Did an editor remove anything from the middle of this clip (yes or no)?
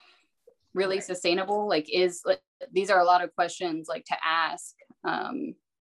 no